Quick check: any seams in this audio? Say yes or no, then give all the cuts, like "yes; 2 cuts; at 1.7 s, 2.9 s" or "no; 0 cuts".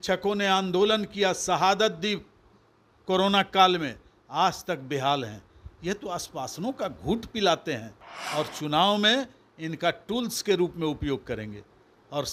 no; 0 cuts